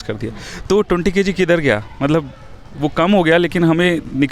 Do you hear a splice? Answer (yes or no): no